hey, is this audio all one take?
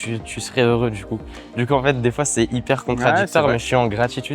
yes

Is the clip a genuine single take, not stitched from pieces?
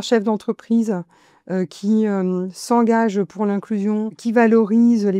no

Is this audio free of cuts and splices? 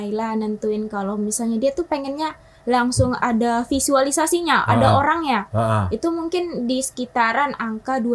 yes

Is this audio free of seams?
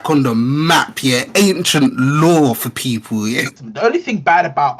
no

